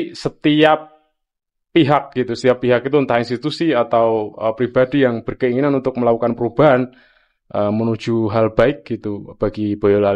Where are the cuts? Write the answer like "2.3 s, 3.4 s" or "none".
none